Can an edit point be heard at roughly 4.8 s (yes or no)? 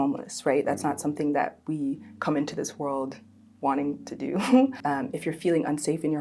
yes